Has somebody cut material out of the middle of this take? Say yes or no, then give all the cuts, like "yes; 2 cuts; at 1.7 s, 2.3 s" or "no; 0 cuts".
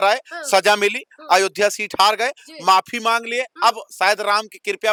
no; 0 cuts